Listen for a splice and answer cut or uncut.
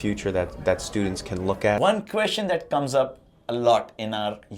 cut